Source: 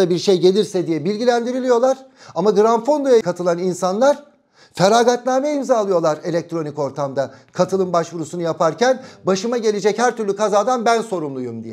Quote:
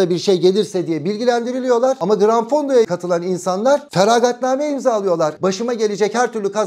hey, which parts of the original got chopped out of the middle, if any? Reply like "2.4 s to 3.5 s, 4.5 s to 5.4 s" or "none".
2.0 s to 2.4 s, 4.2 s to 4.7 s, 6.2 s to 9.2 s